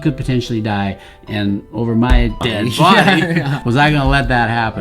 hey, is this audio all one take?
no; 2 cuts; at 2.4 s, 3.6 s

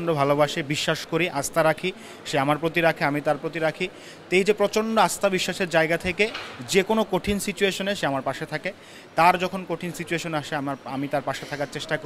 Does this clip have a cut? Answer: no; 0 cuts

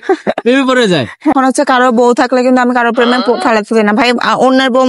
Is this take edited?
yes; 1 cut; at 1.3 s

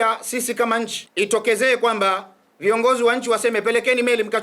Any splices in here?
yes; 1 cut; at 1.0 s

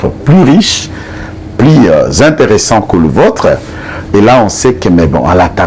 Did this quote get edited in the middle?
no; 0 cuts

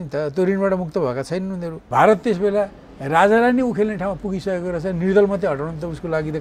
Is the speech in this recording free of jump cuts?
no; 1 cut; at 1.7 s

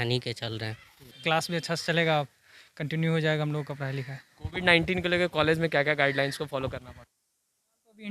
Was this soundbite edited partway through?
yes; 1 cut; at 1.2 s

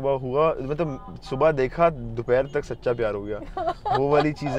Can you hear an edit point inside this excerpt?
no; 0 cuts

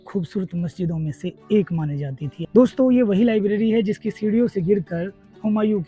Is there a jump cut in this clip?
yes; 1 cut; at 2.3 s

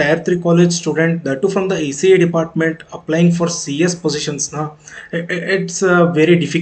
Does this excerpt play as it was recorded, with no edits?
yes; 0 cuts

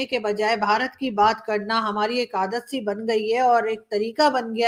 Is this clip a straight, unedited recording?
yes; 0 cuts

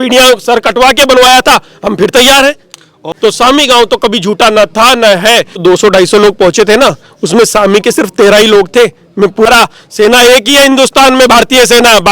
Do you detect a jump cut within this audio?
yes; 3 cuts; at 3.1 s, 5.6 s, 9.5 s

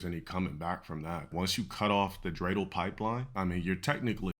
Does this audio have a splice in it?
yes; 2 cuts; at 1.3 s, 3.3 s

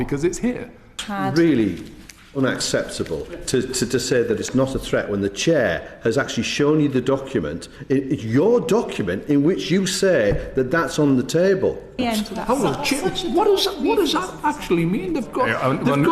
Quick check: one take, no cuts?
no; 2 cuts; at 1.0 s, 11.9 s

